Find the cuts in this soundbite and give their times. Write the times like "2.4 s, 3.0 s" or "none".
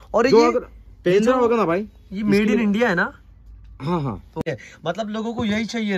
4.4 s